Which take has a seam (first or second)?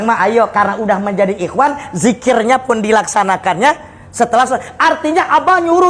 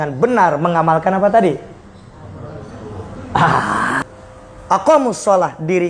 second